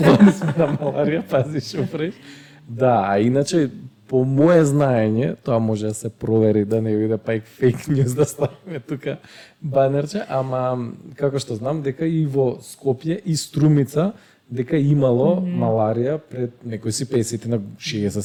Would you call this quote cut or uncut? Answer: uncut